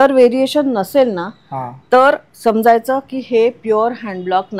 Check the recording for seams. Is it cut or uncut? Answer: uncut